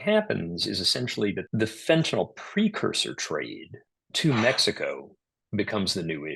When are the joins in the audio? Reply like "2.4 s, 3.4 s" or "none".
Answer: 1.4 s